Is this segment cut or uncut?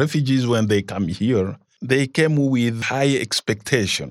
cut